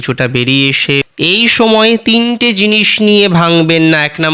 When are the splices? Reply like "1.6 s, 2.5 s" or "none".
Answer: 1.0 s

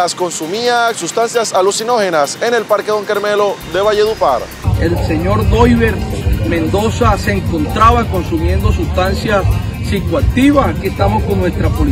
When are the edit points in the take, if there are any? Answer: 4.6 s

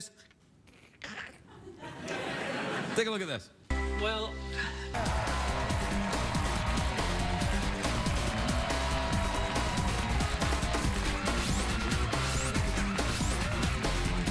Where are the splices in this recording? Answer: 3.2 s

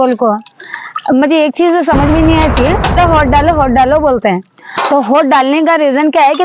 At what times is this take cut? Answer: 2.9 s

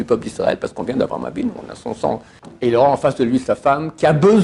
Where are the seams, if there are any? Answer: 2.4 s

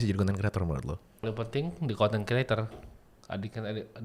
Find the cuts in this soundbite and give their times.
1.2 s

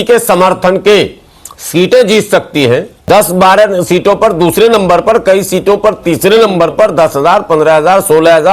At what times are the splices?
3.0 s

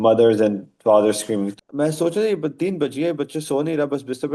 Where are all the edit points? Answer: 1.5 s

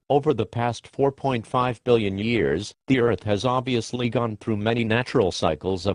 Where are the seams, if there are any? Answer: 4.7 s

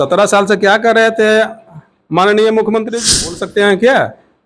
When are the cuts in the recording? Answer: 3.2 s

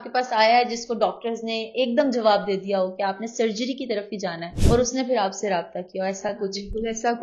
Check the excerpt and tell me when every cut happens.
4.5 s

